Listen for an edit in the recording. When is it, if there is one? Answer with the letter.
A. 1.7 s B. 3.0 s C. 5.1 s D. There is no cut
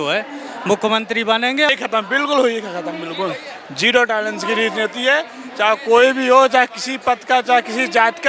A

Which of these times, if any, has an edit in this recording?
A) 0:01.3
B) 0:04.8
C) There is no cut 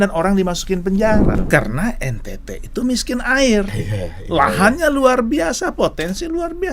A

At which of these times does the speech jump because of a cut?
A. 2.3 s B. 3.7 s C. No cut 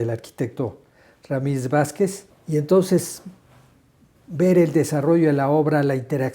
A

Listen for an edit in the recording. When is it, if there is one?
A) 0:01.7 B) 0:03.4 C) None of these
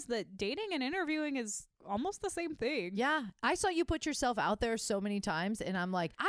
A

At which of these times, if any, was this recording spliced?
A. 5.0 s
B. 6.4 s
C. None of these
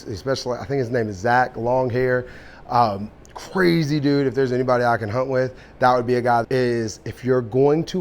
B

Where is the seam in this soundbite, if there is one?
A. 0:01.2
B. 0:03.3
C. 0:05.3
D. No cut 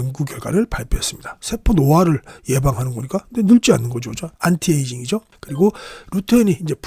C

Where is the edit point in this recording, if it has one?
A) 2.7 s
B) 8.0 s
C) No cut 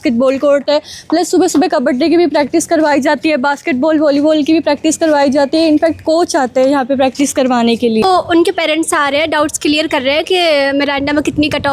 B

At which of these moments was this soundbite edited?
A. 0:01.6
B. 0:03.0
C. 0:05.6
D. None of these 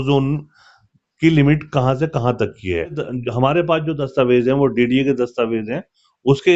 B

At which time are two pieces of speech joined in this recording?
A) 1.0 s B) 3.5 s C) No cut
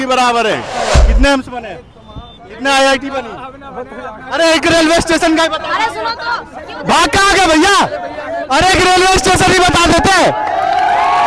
A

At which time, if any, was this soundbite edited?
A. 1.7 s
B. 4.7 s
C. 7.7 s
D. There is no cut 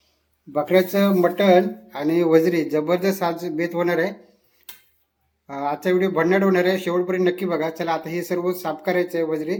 D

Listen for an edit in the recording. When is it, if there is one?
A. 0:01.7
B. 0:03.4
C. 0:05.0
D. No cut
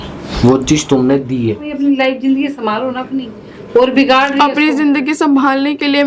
A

